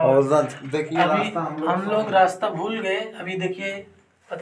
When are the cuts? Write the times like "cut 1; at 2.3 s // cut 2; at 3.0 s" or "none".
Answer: none